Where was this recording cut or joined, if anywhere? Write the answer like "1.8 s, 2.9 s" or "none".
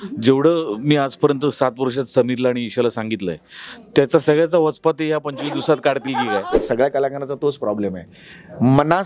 6.6 s

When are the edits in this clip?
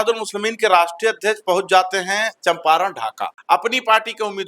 3.3 s

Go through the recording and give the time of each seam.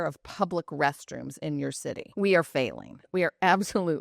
2.0 s

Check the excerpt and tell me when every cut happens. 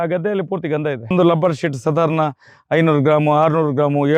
1.1 s

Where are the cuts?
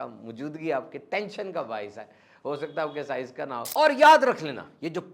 3.7 s

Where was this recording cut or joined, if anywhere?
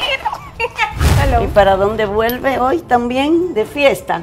1.0 s

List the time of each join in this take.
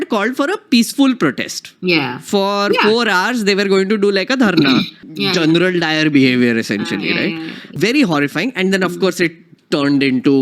5.0 s, 7.7 s

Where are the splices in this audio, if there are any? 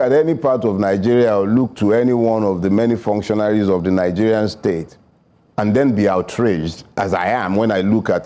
none

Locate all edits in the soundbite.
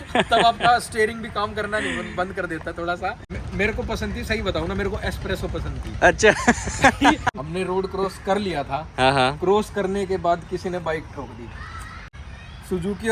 3.2 s, 7.2 s, 12.0 s

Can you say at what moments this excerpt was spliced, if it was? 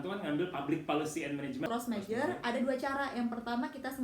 1.7 s

